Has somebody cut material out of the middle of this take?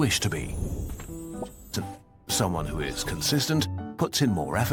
yes; 1 cut; at 1.7 s

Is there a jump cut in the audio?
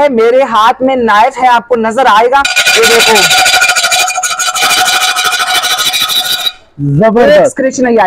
no; 0 cuts

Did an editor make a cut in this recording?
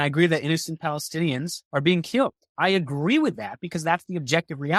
yes; 2 cuts; at 1.6 s, 2.4 s

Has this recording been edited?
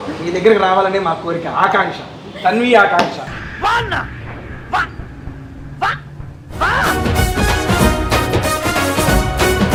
no; 0 cuts

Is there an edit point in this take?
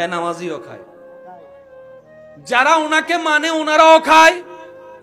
no; 0 cuts

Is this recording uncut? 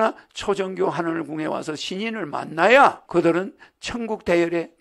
no; 1 cut; at 3.0 s

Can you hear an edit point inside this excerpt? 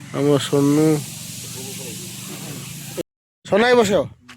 yes; 1 cut; at 3.0 s

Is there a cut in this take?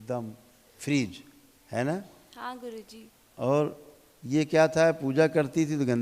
no; 0 cuts

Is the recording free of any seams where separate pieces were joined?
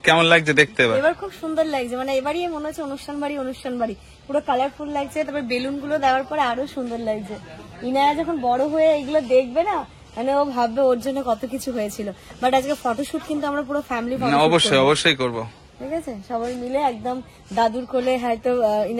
yes; 0 cuts

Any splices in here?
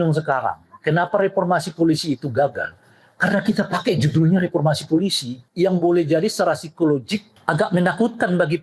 yes; 2 cuts; at 5.4 s, 7.3 s

